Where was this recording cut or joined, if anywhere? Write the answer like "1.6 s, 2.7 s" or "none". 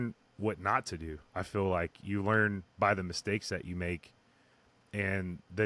none